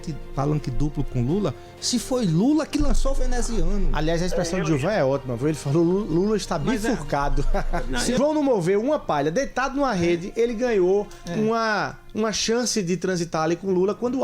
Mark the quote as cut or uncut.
cut